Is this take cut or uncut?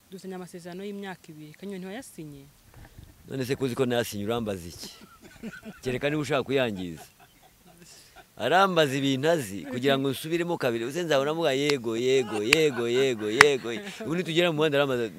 uncut